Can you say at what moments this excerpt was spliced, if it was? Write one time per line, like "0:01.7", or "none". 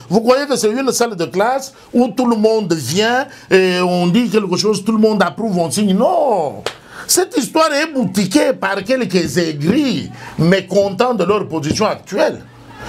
none